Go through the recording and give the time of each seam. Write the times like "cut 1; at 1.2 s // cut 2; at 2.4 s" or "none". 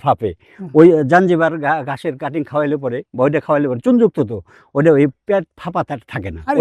none